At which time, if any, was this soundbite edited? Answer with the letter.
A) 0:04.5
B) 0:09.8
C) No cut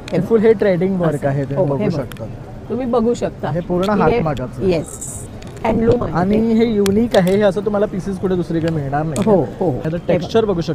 B